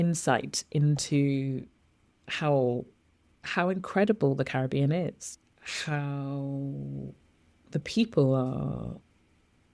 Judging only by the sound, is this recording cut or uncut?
cut